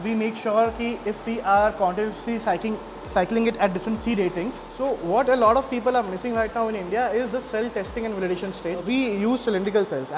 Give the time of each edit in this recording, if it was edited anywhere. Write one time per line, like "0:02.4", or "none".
0:04.7
0:08.8